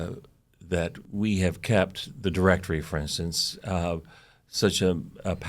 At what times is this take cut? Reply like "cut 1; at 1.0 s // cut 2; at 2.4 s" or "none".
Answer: cut 1; at 1.0 s